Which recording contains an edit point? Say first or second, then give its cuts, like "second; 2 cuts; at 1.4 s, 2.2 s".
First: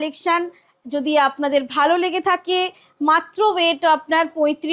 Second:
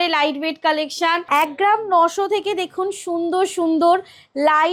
second; 1 cut; at 1.2 s